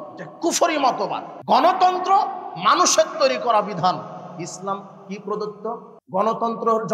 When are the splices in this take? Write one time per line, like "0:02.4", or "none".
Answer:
0:01.3
0:05.9